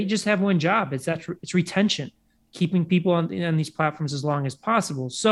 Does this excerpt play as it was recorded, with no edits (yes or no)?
yes